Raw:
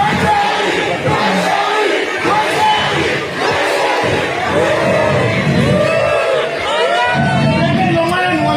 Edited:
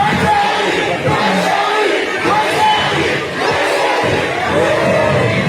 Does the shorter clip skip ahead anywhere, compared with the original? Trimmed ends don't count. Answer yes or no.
no